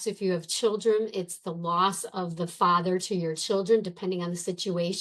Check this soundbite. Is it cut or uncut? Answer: uncut